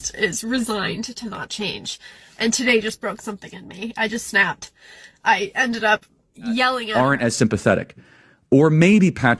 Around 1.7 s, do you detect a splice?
no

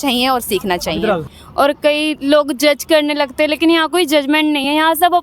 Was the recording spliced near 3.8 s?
no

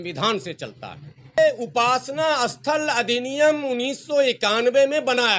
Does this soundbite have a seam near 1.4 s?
yes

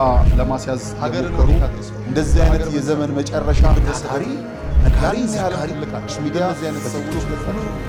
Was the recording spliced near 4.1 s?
no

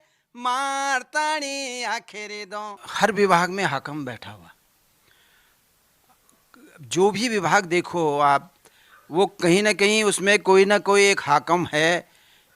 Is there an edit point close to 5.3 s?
no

